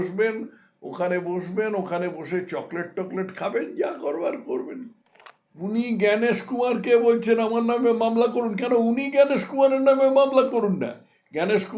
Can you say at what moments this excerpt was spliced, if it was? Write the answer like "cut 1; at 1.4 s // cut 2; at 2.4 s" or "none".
none